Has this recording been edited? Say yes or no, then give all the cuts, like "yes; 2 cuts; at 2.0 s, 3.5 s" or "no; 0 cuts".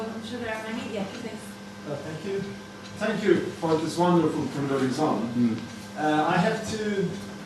yes; 1 cut; at 1.6 s